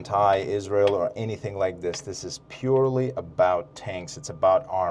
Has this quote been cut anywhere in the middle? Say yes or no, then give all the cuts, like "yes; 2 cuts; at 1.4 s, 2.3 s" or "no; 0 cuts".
no; 0 cuts